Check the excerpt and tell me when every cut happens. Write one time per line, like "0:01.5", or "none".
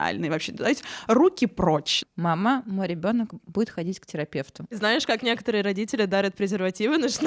0:01.9